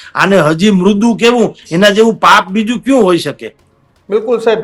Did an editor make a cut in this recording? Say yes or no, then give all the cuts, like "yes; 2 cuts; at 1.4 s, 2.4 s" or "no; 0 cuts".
no; 0 cuts